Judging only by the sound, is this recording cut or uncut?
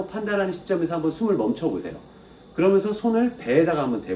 uncut